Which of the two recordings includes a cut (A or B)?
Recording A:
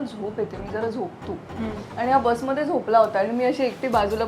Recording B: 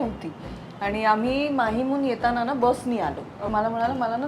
B